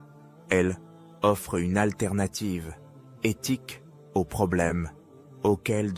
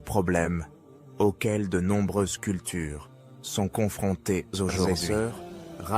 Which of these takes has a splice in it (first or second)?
second